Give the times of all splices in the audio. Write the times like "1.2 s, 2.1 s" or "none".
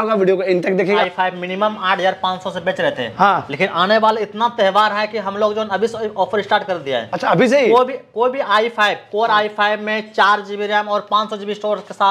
1.0 s

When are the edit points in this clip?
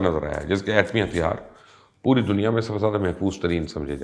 none

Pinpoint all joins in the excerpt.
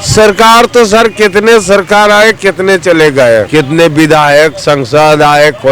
3.5 s

